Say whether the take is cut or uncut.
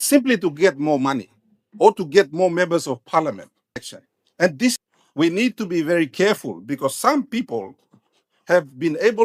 cut